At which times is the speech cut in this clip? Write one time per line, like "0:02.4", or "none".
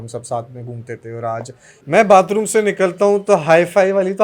0:01.7